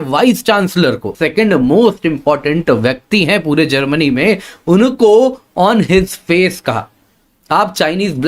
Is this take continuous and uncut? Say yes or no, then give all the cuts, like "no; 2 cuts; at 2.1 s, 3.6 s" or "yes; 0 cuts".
no; 1 cut; at 1.2 s